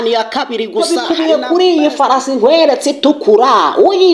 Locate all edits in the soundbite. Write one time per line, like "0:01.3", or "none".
0:00.9